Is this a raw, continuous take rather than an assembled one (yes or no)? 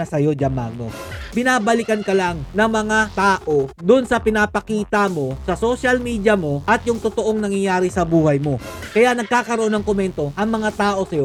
yes